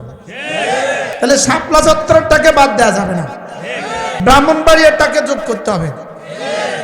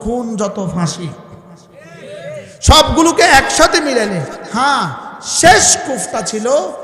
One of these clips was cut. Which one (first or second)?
first